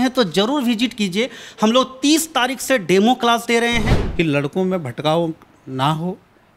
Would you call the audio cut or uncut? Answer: cut